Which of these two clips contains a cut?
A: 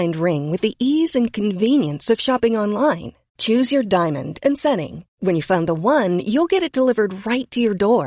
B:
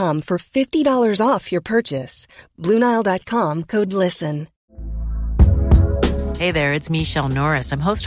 B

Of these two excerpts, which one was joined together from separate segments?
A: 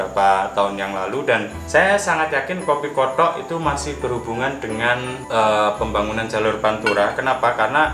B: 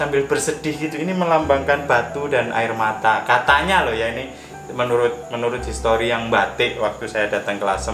A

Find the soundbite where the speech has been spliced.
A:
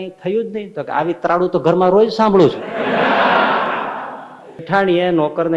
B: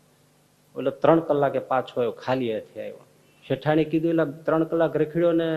A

